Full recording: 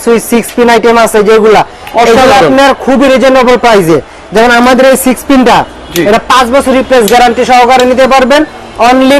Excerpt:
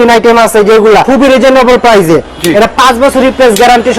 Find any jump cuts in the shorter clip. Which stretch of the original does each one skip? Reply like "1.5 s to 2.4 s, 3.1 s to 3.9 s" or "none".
1.7 s to 2.9 s, 4.1 s to 5.9 s